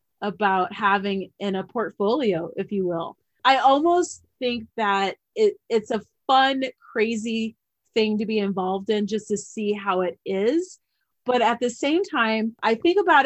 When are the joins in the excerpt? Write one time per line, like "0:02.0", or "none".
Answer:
none